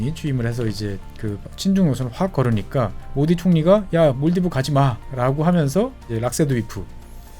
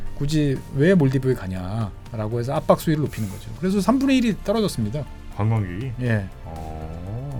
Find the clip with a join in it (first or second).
first